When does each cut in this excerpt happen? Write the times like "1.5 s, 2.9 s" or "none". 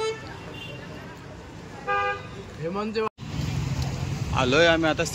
3.2 s